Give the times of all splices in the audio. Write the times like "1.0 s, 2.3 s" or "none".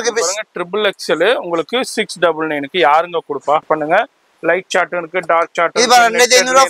3.6 s